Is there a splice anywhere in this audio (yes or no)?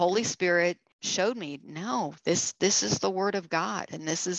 yes